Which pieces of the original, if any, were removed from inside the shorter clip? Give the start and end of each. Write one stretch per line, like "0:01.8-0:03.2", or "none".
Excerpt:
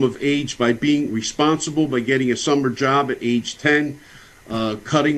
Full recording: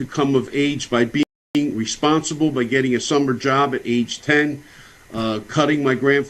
0:01.2-0:01.6